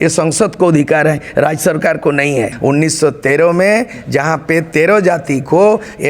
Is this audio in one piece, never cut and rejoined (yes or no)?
no